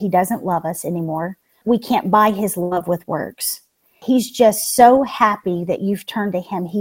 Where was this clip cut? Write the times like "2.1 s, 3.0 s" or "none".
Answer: 1.6 s, 3.9 s